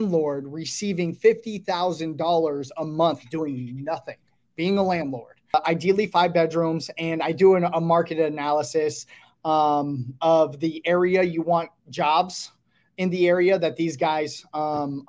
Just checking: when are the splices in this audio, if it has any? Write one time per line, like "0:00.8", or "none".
0:05.5